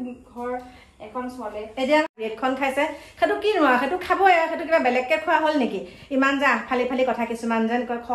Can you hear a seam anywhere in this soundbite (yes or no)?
yes